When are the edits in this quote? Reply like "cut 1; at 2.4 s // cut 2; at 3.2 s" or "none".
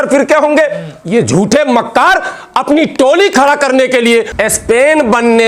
cut 1; at 4.4 s